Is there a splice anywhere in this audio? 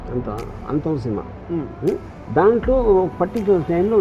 yes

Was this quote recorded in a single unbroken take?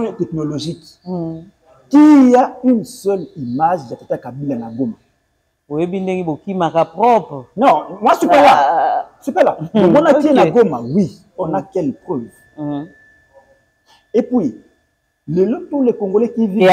yes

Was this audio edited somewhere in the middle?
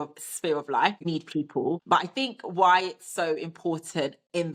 yes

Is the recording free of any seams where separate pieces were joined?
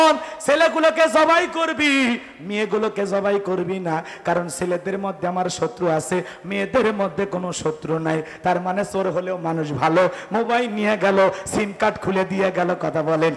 yes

